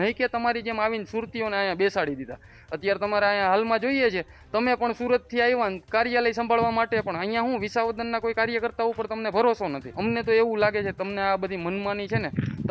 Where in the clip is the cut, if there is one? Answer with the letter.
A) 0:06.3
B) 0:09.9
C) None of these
B